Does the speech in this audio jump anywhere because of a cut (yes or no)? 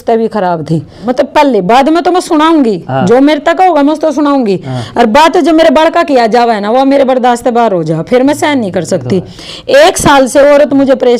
yes